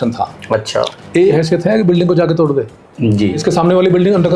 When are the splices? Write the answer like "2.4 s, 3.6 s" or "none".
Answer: 1.3 s, 3.4 s